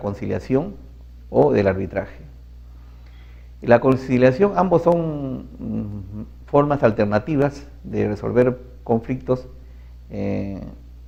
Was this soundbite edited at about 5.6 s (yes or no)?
no